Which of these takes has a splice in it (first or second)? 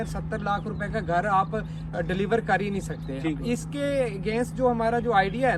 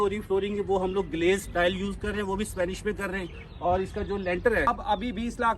second